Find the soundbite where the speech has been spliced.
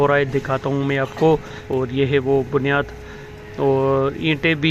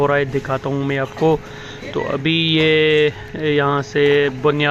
first; 1 cut; at 1.6 s

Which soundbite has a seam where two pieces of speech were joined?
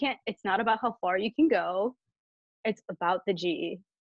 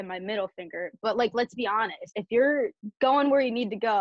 second; 2 cuts; at 2.0 s, 2.8 s

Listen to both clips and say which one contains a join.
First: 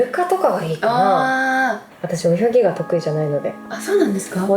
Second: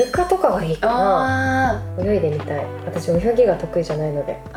first; 1 cut; at 1.9 s

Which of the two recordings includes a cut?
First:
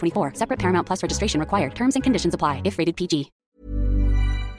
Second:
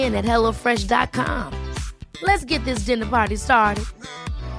first; 1 cut; at 3.4 s

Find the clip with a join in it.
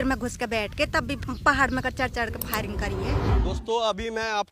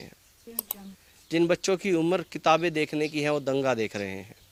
first; 1 cut; at 3.3 s

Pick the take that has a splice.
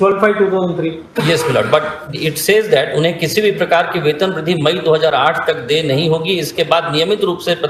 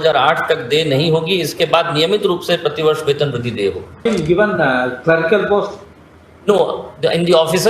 second; 1 cut; at 4.0 s

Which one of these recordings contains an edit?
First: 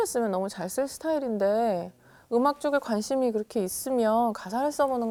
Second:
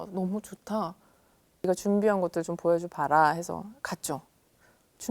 second; 1 cut; at 1.7 s

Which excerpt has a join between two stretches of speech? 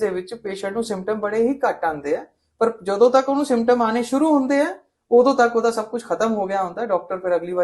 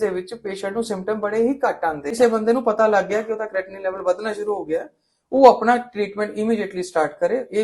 second; 1 cut; at 2.1 s

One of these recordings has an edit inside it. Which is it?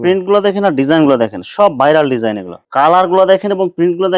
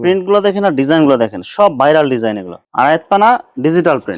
first; 1 cut; at 2.5 s

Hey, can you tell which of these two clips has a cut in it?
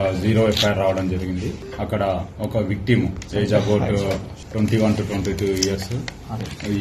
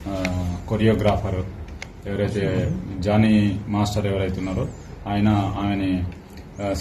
first; 2 cuts; at 1.6 s, 4.4 s

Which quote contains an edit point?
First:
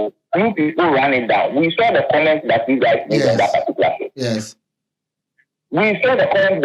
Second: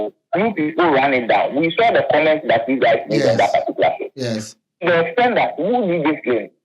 second; 1 cut; at 4.8 s

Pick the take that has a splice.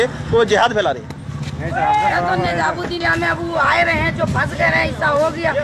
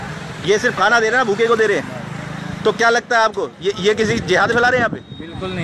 first; 1 cut; at 3.0 s

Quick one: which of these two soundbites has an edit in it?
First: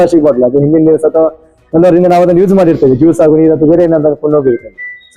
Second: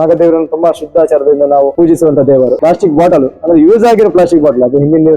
second; 2 cuts; at 1.7 s, 2.6 s

